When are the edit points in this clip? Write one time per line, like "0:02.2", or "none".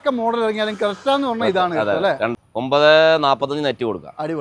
0:02.3

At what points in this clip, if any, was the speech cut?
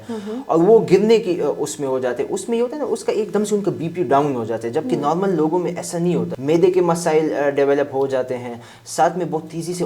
0:06.3

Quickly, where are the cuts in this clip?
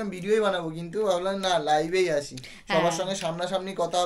none

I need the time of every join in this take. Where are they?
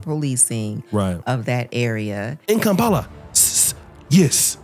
0:02.4

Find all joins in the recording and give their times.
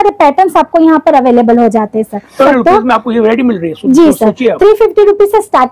0:02.5

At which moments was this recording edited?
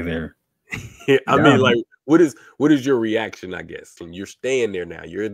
0:04.0

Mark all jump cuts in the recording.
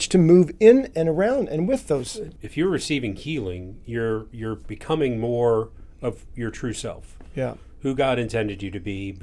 0:02.3

